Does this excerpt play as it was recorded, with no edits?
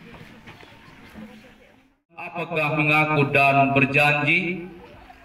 no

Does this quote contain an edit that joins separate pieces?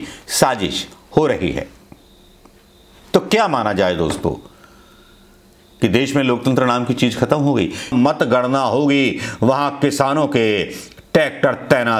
yes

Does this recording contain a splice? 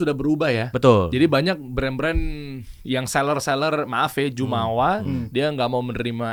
no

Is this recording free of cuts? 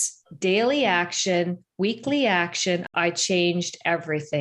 no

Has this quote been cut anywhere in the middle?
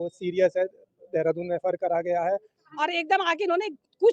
yes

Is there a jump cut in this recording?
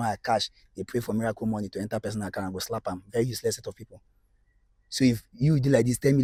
no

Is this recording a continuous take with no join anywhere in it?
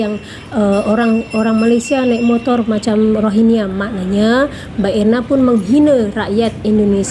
yes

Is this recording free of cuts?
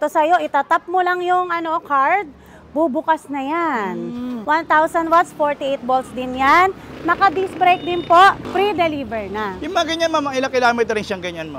no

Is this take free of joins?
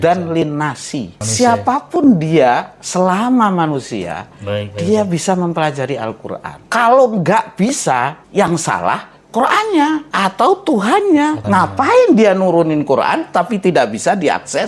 no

